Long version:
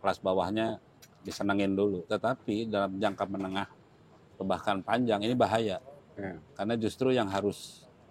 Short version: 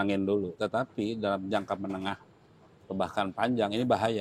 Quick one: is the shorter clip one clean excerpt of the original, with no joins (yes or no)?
yes